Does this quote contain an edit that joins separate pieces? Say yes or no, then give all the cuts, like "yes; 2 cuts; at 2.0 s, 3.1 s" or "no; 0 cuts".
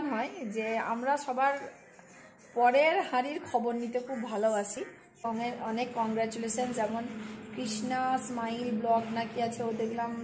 yes; 1 cut; at 5.2 s